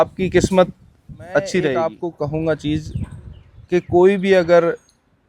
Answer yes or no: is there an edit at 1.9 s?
yes